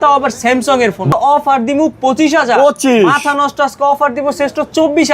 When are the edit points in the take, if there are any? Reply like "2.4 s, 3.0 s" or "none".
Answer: 1.1 s